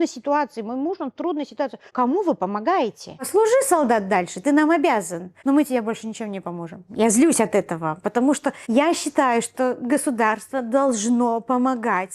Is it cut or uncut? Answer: cut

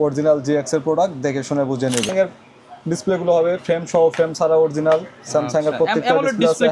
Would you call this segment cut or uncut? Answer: cut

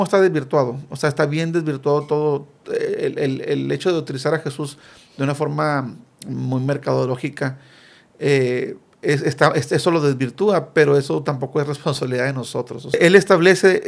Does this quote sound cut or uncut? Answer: cut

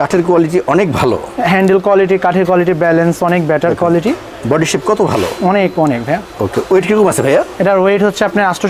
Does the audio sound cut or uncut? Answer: uncut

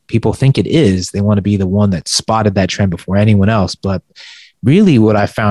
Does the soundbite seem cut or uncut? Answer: uncut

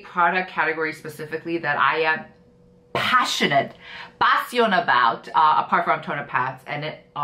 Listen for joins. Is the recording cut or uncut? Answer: uncut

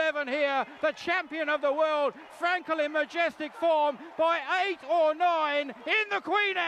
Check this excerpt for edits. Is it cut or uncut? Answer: uncut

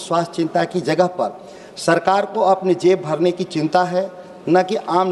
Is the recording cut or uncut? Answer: uncut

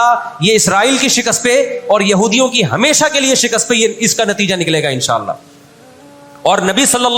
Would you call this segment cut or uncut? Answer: uncut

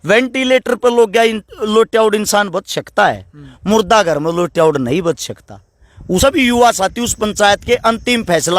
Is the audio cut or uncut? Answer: cut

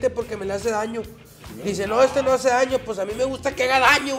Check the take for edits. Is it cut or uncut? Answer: uncut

